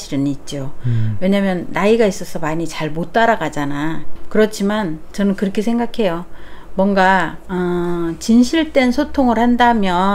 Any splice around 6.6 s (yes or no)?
no